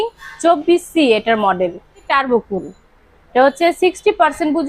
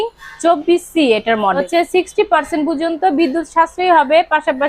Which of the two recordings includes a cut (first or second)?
second